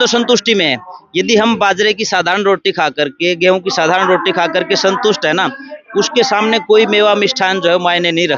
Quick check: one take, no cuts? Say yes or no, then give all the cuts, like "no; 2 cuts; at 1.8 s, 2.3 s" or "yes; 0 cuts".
yes; 0 cuts